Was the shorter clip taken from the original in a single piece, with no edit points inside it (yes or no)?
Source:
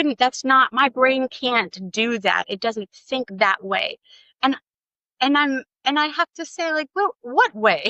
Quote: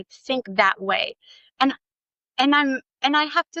yes